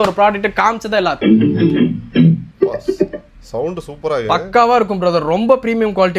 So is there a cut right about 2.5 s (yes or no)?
yes